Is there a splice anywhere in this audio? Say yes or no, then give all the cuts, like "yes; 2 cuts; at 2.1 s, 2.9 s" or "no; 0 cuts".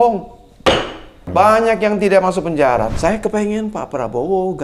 yes; 2 cuts; at 1.1 s, 2.9 s